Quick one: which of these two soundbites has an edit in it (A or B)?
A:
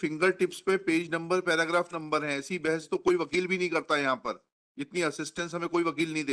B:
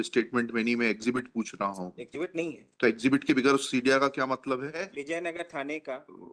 B